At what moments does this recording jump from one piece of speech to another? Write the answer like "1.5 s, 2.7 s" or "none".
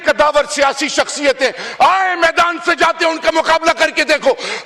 none